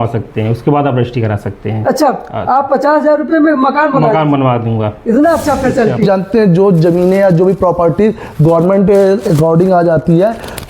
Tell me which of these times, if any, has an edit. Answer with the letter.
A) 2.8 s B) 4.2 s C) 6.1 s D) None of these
C